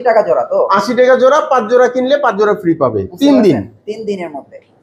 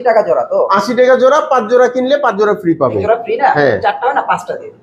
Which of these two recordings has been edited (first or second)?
second